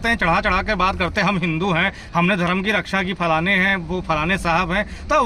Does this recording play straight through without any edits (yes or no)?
yes